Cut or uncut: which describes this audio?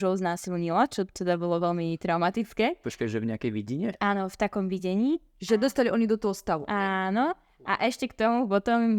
uncut